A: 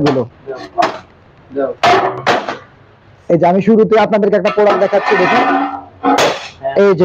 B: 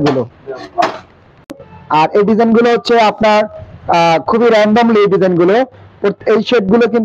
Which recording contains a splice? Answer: B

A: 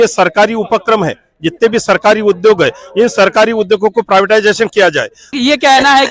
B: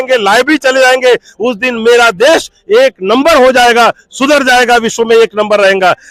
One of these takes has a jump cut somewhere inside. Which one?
A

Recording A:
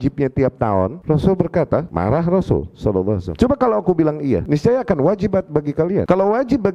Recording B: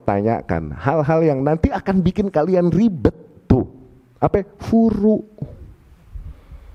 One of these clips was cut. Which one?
A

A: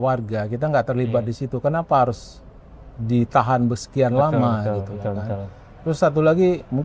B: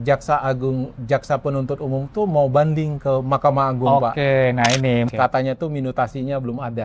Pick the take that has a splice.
B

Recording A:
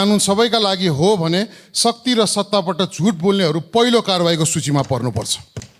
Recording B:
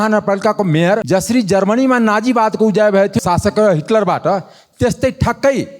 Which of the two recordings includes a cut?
B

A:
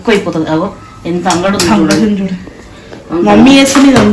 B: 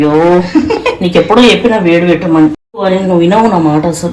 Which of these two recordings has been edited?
B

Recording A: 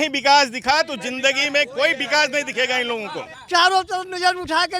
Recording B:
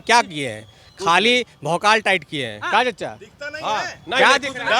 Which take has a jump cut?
A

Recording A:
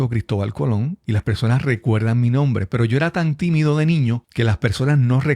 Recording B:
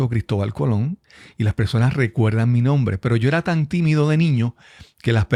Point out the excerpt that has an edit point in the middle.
A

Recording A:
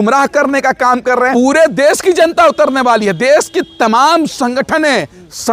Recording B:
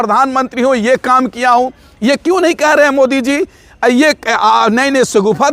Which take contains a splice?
A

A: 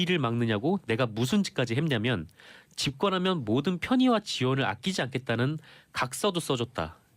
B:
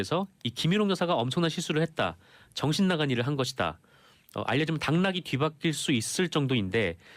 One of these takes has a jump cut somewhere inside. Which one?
A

